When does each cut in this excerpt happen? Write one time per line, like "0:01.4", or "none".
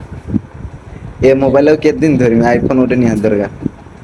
none